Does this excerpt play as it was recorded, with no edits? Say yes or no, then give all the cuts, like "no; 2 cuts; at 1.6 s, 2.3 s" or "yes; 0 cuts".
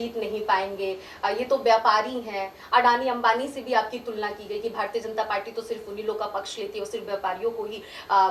yes; 0 cuts